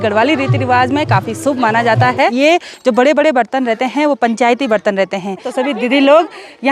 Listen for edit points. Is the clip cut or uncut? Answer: cut